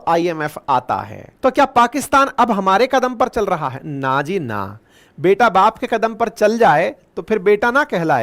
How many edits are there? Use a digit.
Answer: 1